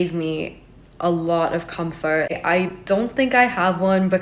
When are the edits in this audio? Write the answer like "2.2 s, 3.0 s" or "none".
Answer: 2.4 s